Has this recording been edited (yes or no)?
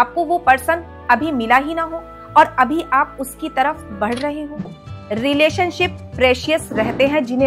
yes